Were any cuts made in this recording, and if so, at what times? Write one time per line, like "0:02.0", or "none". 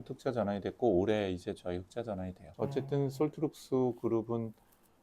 0:02.4